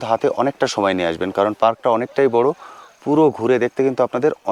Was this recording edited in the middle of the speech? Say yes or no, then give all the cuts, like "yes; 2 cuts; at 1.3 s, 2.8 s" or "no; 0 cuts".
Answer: no; 0 cuts